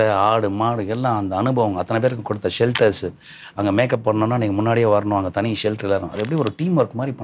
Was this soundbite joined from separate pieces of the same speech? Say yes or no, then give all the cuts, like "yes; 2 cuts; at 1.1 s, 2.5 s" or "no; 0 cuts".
no; 0 cuts